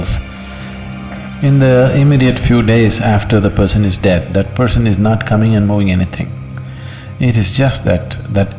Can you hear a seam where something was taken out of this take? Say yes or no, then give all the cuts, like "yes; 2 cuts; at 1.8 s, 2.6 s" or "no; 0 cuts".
no; 0 cuts